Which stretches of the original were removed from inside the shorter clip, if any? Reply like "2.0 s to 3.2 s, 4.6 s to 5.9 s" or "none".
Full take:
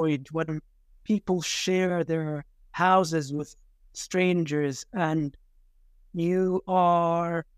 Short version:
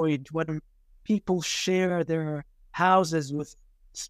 none